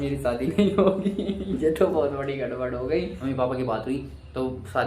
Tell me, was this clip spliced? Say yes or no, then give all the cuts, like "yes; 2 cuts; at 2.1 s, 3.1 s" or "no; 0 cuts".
yes; 1 cut; at 3.1 s